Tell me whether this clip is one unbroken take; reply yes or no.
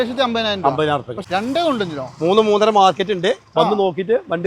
no